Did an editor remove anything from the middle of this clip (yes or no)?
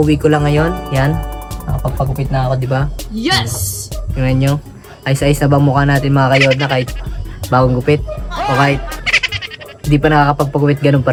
no